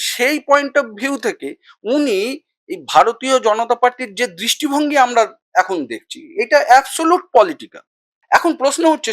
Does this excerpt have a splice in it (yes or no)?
yes